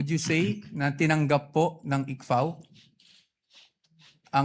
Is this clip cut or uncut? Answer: uncut